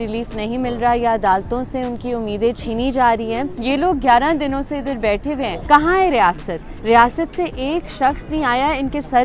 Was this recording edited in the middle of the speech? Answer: yes; 2 cuts; at 3.5 s, 5.6 s

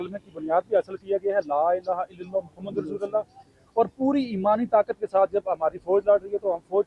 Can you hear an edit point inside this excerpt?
no; 0 cuts

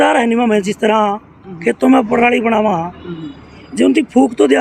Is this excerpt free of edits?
yes; 0 cuts

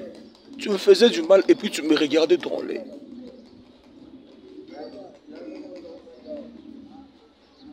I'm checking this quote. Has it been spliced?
no; 0 cuts

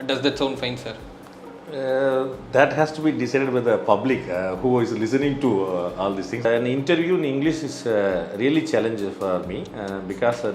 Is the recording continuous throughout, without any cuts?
no; 1 cut; at 6.4 s

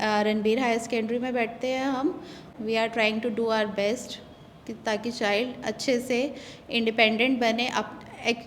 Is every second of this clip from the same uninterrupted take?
no; 1 cut; at 2.5 s

